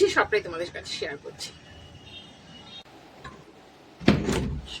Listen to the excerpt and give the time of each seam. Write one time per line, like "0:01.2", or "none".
0:02.9